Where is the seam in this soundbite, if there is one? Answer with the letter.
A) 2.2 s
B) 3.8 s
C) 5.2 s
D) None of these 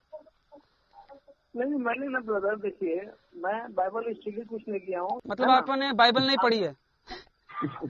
C